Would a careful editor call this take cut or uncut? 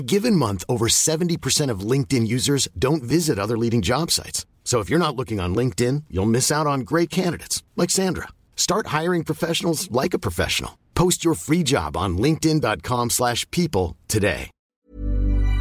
cut